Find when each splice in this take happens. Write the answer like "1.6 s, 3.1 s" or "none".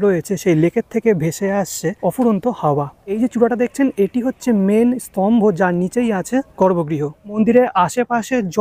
2.0 s, 3.2 s, 6.5 s, 7.3 s